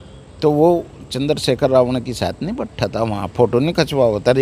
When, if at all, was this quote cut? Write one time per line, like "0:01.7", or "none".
none